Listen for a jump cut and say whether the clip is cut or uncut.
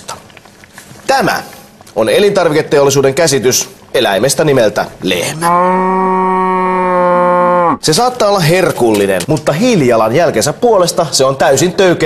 uncut